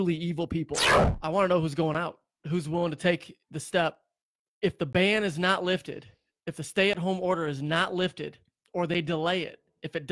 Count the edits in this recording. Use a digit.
1